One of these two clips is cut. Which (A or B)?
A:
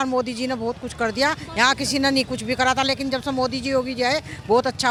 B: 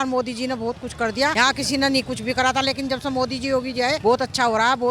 B